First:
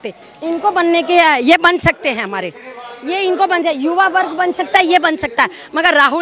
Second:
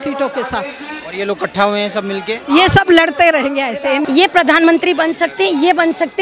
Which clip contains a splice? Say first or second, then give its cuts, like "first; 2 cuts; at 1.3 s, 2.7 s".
second; 1 cut; at 4.0 s